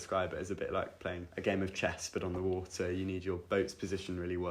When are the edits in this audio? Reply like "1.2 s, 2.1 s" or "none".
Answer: 1.3 s